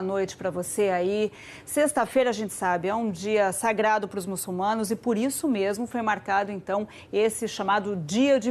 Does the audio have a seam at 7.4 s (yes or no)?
no